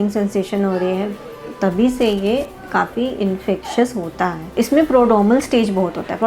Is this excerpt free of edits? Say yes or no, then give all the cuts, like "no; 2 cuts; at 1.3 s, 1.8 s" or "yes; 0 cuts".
no; 1 cut; at 4.5 s